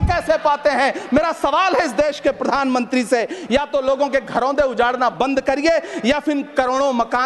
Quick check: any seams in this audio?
no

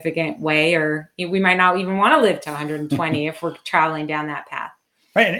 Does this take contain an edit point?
no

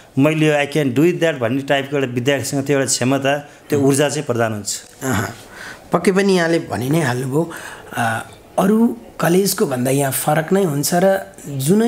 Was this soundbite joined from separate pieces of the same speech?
no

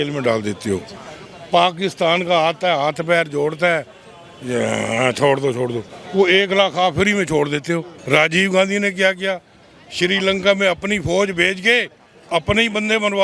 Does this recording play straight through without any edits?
no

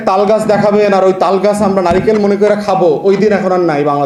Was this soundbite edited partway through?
no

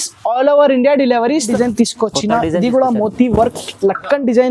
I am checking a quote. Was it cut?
yes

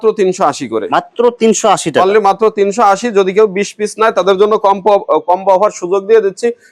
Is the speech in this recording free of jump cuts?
yes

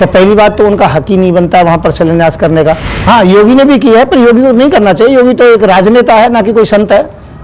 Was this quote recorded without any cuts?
no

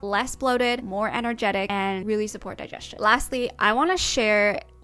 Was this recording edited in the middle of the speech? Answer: no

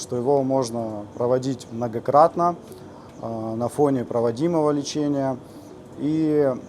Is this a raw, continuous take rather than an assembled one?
yes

